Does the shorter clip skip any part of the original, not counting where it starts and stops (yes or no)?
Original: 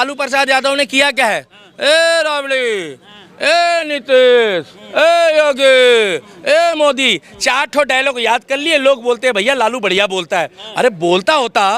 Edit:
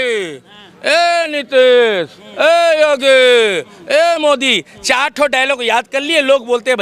no